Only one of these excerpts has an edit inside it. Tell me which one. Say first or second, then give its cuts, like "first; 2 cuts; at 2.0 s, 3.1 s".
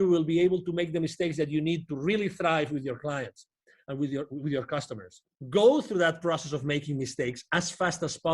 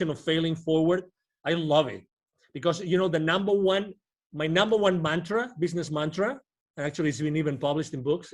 first; 1 cut; at 5.3 s